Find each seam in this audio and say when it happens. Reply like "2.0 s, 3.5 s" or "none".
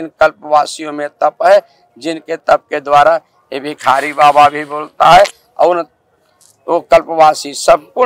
none